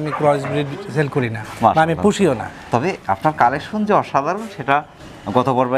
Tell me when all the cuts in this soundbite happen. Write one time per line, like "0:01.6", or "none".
none